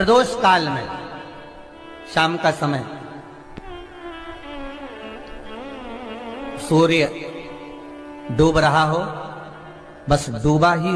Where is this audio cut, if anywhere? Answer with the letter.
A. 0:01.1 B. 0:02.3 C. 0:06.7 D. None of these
D